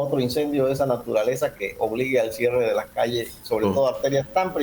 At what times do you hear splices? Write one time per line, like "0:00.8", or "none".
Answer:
none